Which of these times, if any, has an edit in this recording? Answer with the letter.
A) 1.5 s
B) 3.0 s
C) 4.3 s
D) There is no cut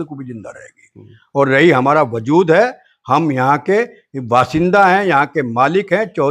D